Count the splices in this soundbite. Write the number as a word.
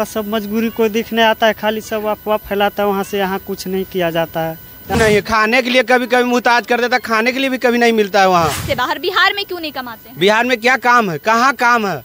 two